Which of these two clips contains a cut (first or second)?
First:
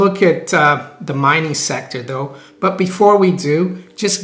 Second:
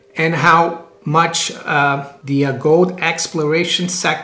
second